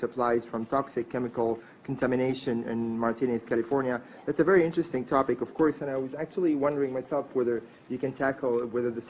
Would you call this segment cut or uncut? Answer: uncut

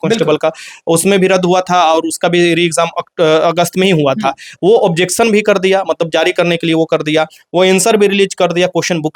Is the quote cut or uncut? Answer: uncut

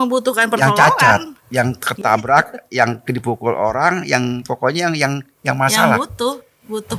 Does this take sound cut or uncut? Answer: uncut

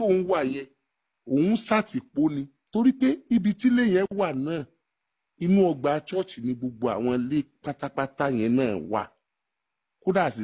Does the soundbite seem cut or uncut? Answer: cut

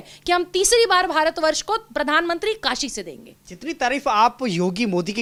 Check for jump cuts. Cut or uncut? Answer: uncut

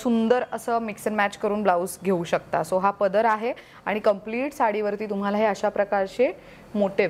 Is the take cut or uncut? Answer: uncut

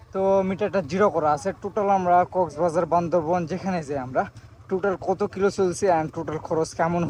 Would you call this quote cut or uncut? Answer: uncut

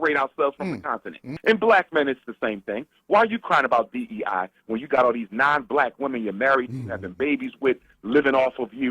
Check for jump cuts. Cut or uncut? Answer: cut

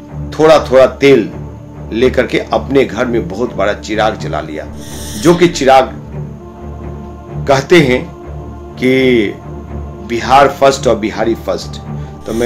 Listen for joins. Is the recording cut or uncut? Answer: uncut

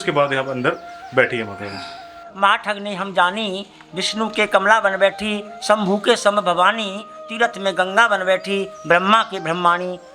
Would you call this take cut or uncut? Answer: cut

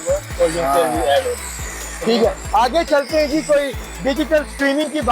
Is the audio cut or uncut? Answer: uncut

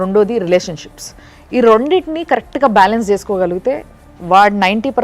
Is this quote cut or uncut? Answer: uncut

